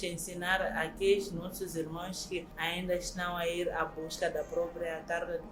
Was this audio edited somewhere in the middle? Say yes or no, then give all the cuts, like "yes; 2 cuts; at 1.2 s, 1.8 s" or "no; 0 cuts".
no; 0 cuts